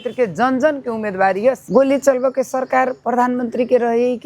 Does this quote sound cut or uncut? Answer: cut